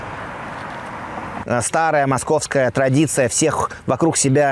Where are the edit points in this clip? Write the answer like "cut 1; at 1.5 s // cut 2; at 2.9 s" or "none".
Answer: cut 1; at 1.3 s